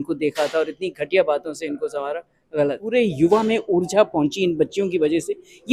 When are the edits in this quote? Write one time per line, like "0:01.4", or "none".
0:02.8